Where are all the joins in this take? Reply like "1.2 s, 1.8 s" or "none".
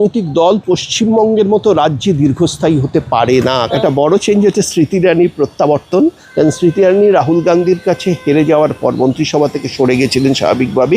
3.7 s